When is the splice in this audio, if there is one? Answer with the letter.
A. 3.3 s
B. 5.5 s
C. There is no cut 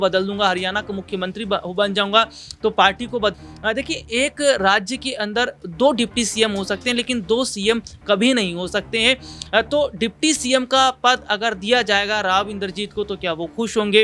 A